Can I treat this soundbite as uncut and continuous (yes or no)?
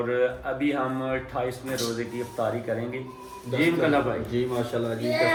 yes